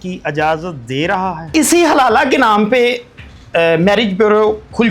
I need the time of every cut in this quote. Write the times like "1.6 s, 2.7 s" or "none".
1.5 s